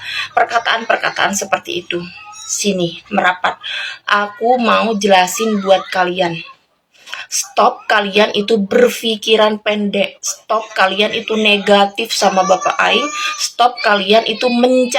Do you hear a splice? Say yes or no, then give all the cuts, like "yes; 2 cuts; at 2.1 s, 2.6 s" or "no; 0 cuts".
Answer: no; 0 cuts